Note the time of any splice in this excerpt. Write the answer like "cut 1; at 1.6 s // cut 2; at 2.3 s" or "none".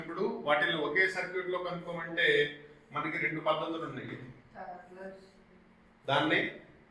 none